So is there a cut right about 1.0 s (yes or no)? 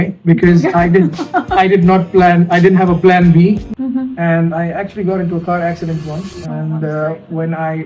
no